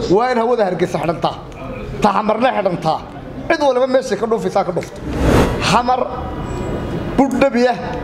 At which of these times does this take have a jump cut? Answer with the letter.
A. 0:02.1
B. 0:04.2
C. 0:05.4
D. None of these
C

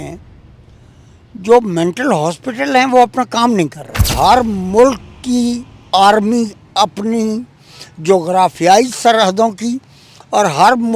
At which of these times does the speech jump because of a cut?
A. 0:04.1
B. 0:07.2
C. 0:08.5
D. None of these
A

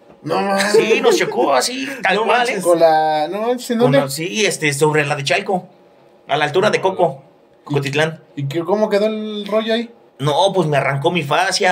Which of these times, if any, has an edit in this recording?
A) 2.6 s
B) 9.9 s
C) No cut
C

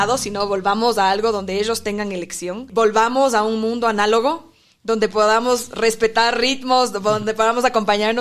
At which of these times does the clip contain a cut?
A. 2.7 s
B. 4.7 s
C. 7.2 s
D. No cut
A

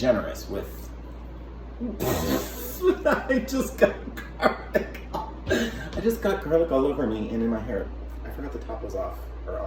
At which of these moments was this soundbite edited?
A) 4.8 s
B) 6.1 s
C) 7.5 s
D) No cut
D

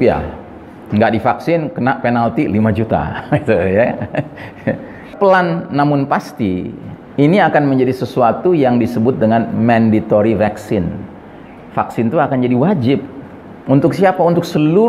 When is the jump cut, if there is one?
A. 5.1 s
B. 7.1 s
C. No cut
A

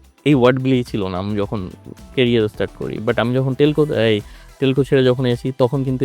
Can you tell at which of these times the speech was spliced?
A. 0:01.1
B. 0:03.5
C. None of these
C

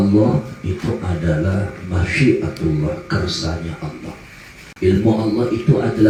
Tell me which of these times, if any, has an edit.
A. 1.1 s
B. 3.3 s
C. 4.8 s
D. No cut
D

